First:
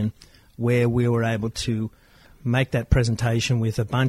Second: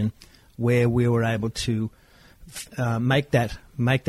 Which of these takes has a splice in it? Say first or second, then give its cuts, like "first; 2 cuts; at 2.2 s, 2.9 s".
first; 1 cut; at 2.3 s